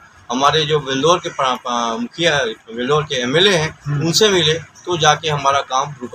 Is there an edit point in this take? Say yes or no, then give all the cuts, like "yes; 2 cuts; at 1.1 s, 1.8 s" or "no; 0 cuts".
no; 0 cuts